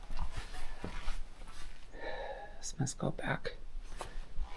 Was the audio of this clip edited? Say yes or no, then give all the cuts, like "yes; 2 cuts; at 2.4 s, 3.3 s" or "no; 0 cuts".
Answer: no; 0 cuts